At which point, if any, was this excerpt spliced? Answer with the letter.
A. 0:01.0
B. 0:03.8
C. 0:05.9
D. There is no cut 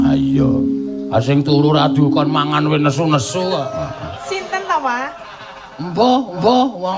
D